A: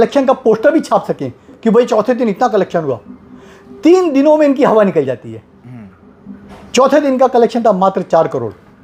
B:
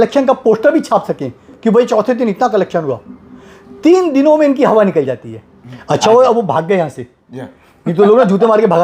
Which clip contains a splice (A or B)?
B